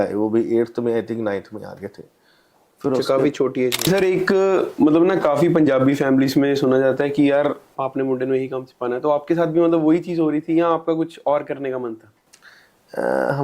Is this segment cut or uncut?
cut